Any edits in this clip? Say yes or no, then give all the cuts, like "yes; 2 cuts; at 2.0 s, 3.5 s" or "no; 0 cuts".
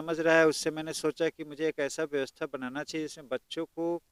no; 0 cuts